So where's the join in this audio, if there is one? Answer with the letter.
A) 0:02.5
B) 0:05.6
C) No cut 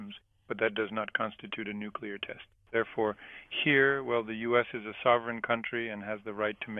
A